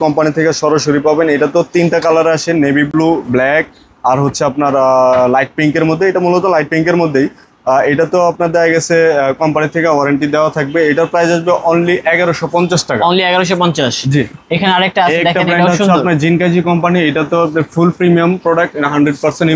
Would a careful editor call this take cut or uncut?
uncut